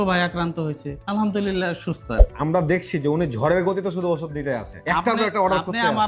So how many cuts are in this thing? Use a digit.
0